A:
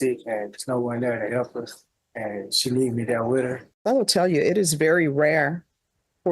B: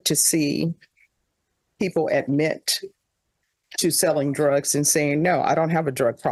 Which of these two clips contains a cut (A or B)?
A